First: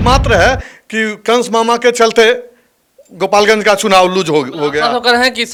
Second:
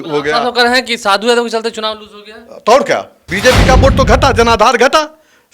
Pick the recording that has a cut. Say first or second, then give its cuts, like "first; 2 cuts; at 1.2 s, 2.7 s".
second; 1 cut; at 3.2 s